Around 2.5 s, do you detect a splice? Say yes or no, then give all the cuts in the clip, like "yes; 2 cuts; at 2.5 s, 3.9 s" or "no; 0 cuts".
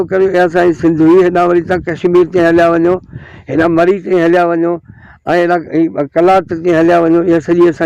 no; 0 cuts